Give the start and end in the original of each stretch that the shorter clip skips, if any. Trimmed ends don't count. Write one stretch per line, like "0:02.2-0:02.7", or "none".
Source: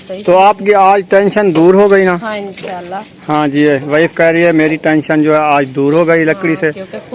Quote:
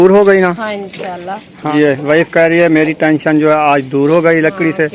0:03.3-0:03.5